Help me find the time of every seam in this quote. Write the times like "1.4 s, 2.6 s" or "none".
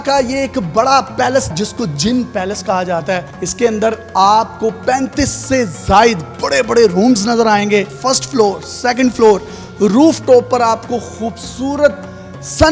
1.5 s, 3.4 s